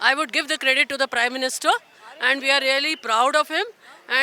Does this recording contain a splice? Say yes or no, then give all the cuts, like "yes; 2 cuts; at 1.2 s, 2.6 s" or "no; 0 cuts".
no; 0 cuts